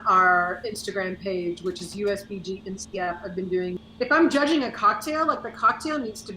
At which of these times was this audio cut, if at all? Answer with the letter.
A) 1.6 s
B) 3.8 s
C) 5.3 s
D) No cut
B